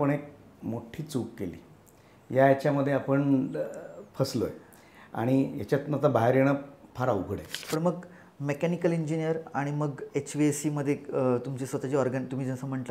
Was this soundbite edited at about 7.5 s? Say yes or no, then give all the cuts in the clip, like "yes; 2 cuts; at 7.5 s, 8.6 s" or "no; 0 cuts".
yes; 1 cut; at 7.5 s